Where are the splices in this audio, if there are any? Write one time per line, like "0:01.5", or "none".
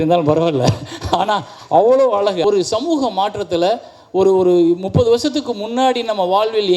0:02.4